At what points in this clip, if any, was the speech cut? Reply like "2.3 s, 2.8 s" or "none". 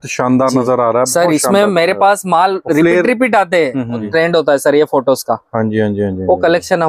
4.1 s